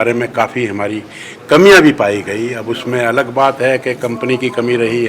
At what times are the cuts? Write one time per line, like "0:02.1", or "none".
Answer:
none